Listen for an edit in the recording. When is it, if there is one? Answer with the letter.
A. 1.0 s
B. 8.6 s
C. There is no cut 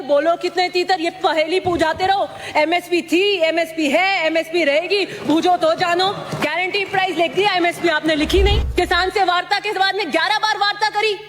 B